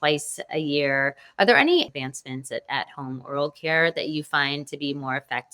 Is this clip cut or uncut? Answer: cut